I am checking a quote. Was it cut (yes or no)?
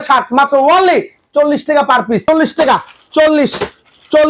yes